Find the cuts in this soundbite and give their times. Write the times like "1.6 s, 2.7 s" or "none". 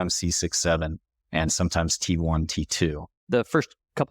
3.2 s

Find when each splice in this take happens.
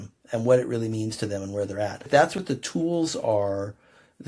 2.1 s

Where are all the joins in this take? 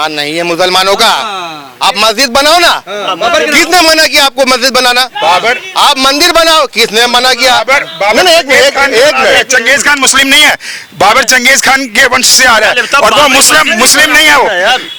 none

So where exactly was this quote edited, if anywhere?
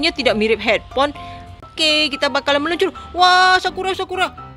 1.7 s

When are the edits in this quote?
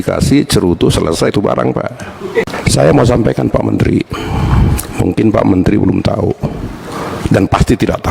2.4 s

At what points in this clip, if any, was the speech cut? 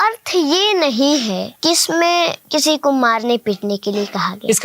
1.5 s, 2.4 s

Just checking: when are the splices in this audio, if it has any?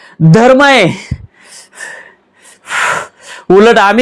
2.6 s

